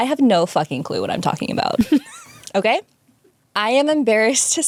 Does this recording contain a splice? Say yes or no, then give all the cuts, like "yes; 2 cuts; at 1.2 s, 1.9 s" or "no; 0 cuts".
no; 0 cuts